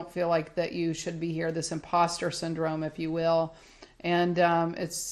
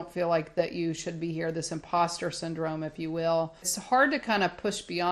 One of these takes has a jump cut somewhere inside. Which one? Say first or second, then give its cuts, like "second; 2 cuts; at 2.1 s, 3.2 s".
second; 1 cut; at 3.7 s